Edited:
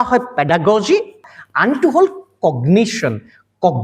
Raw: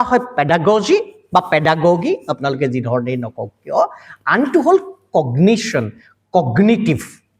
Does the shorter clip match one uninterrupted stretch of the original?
no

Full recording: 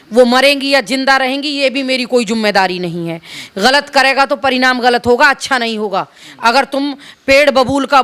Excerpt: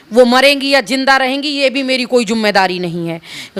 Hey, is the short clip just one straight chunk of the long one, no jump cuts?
yes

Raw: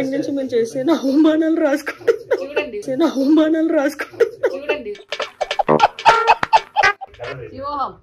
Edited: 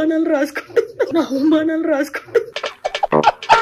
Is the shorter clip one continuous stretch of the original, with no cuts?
no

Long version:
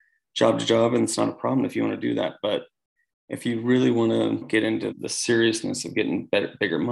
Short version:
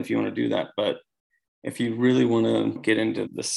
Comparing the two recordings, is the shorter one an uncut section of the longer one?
yes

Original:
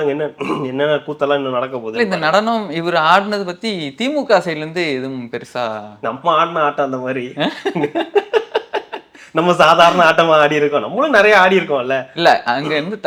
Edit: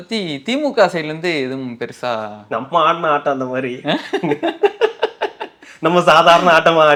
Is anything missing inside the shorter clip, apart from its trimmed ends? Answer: no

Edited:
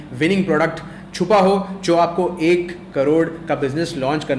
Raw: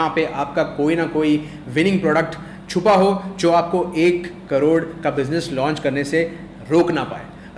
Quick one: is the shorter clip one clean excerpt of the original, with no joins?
yes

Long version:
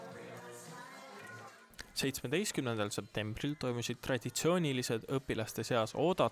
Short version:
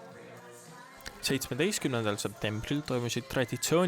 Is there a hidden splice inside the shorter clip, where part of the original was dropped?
yes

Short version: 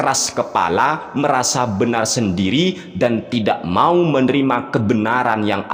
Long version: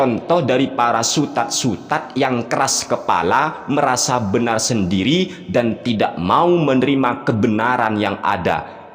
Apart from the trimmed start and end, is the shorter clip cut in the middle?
no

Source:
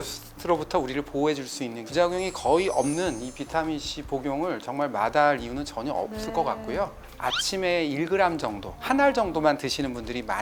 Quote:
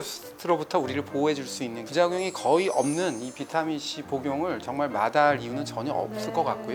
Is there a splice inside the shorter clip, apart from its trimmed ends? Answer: no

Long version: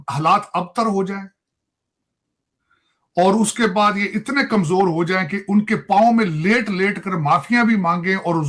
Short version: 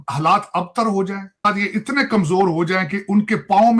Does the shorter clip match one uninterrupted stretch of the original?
no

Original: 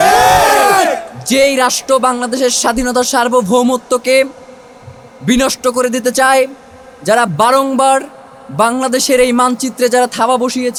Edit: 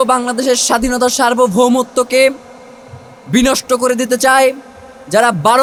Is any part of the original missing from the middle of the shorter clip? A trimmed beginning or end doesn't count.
no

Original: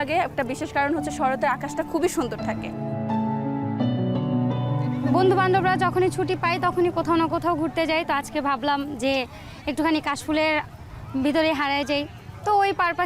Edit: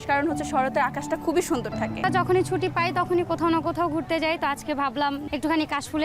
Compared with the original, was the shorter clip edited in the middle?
yes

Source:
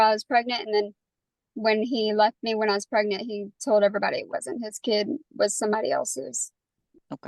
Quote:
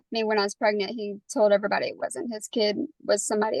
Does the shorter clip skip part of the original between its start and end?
no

